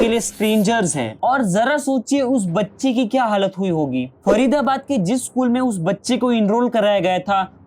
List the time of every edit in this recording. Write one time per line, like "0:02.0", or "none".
none

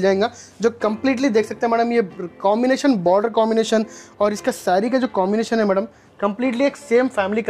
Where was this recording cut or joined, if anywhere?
none

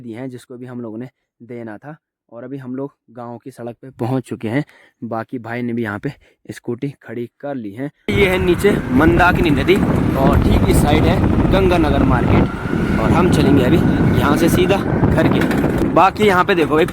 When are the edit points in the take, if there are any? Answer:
0:08.1
0:15.8

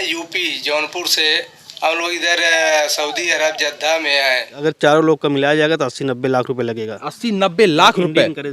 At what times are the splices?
0:04.6

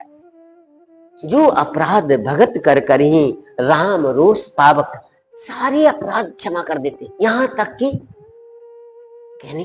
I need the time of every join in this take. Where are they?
none

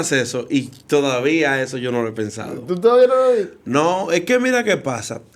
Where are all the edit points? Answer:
none

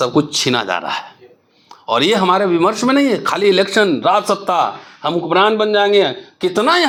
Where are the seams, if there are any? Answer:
none

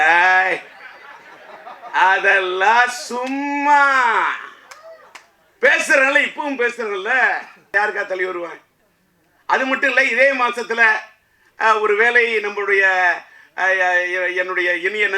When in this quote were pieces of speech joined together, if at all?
0:07.7

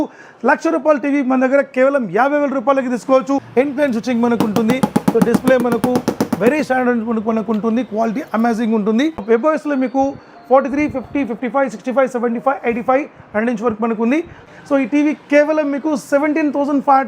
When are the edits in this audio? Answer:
0:03.5
0:09.2
0:14.5

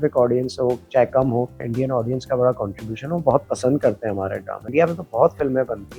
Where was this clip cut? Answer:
0:01.6
0:04.7

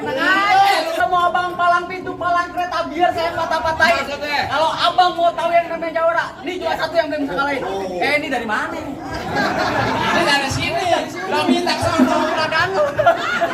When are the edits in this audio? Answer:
0:01.0

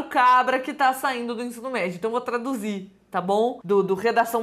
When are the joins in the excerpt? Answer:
none

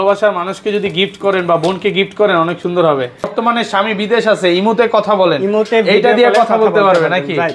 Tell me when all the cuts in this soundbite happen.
0:03.3

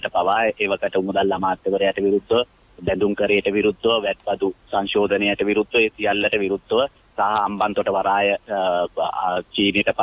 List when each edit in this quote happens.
none

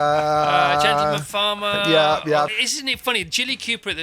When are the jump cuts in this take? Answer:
0:02.5

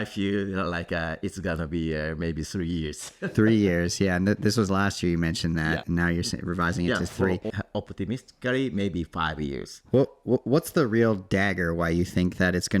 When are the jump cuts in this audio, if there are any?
0:05.8
0:07.6

